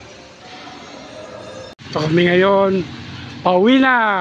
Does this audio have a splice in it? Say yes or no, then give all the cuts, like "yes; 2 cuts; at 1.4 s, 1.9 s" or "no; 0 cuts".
yes; 1 cut; at 1.8 s